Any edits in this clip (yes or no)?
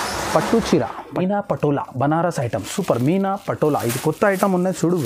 yes